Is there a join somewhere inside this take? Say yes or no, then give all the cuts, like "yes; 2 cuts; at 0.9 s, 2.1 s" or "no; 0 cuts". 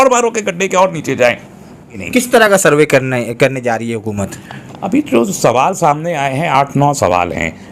yes; 1 cut; at 2.0 s